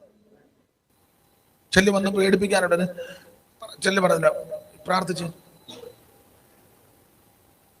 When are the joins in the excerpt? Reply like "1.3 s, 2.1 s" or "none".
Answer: 0.9 s